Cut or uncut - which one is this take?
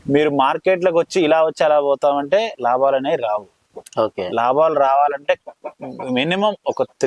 uncut